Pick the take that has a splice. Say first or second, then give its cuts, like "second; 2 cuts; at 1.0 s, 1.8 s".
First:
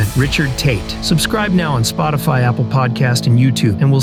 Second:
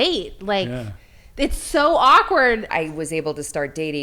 second; 1 cut; at 2.7 s